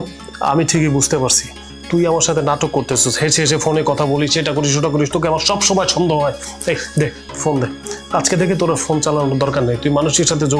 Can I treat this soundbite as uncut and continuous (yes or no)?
yes